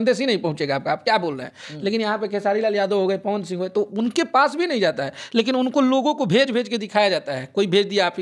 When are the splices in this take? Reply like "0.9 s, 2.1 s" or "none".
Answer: none